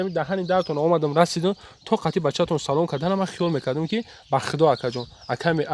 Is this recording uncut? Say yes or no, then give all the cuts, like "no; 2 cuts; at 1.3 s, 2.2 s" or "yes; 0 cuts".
yes; 0 cuts